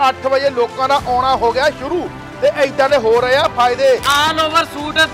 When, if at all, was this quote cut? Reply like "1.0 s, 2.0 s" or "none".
4.1 s